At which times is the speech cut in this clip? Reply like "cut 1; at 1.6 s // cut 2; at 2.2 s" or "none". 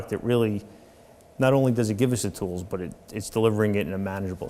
none